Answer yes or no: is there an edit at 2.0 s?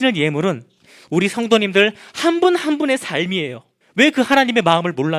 no